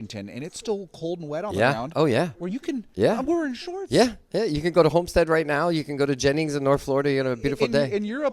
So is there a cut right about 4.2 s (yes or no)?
no